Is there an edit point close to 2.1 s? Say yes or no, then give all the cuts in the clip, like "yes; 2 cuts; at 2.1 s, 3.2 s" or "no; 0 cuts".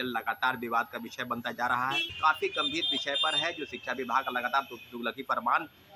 yes; 1 cut; at 2.1 s